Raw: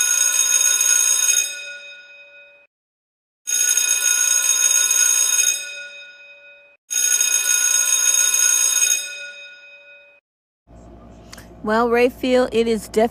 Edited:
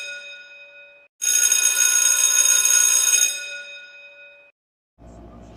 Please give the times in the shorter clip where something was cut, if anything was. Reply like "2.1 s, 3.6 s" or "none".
1.1 s, 4.5 s